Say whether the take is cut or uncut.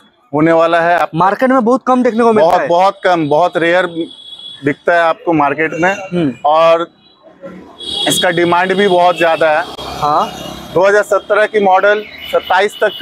uncut